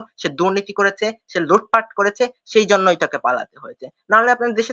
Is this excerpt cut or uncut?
uncut